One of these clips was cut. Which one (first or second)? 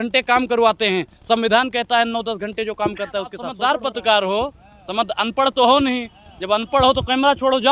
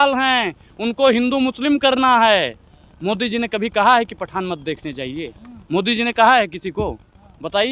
first